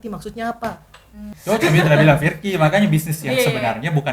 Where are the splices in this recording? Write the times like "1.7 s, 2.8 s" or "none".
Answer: 1.0 s